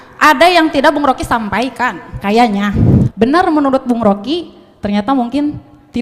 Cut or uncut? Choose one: cut